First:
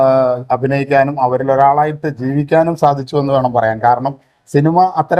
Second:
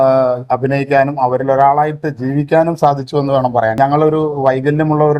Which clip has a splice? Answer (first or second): second